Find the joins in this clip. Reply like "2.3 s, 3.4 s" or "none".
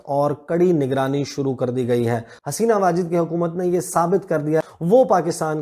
2.4 s, 4.7 s